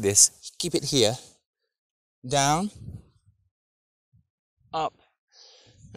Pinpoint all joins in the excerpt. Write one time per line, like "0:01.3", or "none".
none